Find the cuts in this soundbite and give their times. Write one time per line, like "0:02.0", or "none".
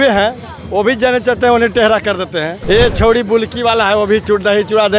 0:02.6